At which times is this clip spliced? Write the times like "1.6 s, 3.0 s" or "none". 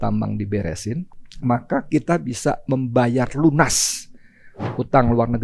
1.1 s